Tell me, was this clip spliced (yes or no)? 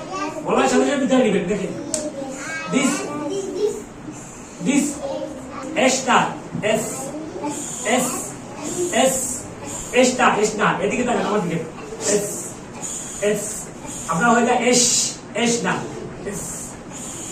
yes